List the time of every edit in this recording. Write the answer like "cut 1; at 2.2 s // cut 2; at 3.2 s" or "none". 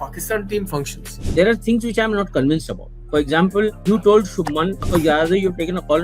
cut 1; at 1.2 s // cut 2; at 3.8 s // cut 3; at 4.8 s